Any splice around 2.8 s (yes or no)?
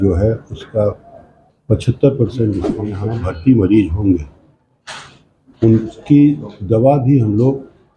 yes